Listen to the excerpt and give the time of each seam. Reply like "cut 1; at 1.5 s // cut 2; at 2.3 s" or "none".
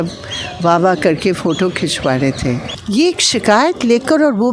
cut 1; at 2.7 s